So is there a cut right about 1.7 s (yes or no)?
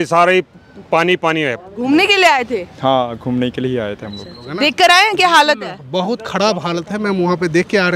yes